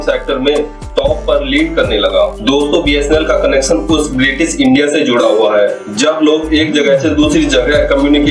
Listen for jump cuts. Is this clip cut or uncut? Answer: uncut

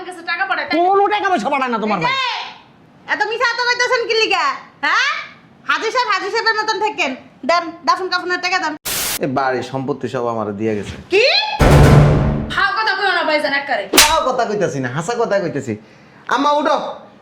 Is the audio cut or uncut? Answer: cut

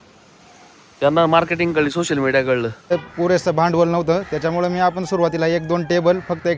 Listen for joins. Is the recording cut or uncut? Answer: cut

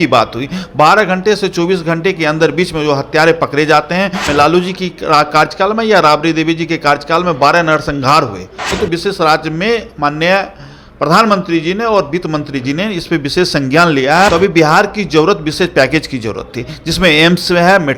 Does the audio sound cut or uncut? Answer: cut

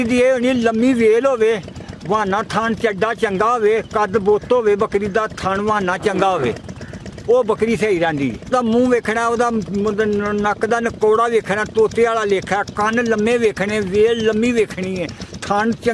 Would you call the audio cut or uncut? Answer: cut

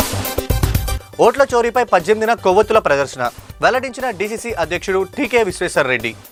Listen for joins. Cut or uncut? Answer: uncut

